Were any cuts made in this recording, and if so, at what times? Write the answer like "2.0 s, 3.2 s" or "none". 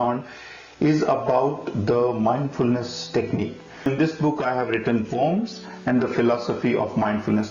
3.9 s